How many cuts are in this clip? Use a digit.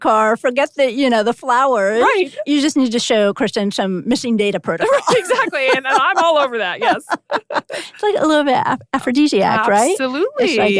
0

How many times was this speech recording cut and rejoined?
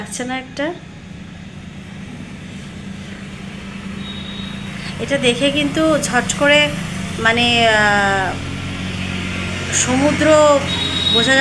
0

